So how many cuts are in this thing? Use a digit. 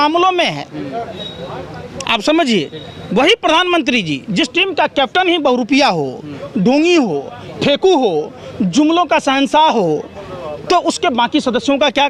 0